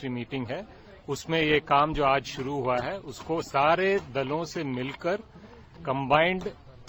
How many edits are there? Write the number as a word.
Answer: zero